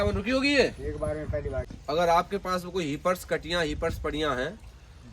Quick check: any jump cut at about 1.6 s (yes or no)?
yes